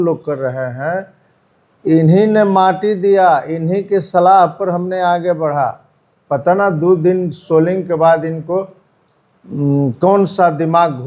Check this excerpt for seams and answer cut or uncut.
uncut